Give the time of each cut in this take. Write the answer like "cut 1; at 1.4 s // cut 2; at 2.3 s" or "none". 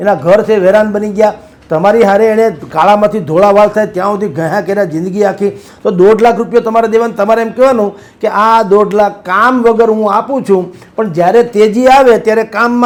none